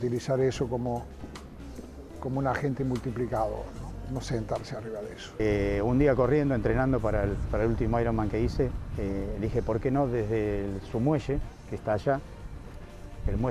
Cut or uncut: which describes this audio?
cut